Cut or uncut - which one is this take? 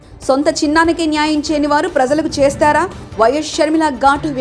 uncut